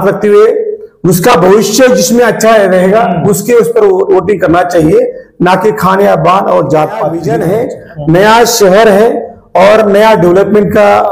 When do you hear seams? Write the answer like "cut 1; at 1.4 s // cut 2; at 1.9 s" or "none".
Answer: cut 1; at 7.2 s